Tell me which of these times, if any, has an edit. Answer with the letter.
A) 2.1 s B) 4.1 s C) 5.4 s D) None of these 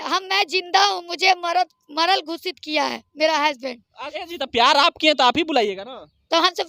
B